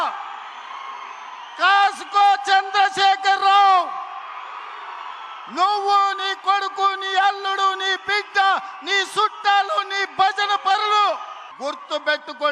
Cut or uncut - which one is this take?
cut